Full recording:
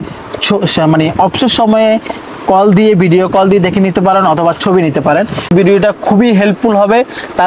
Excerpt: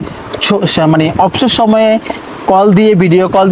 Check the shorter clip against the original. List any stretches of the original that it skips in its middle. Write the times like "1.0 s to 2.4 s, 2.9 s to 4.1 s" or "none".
none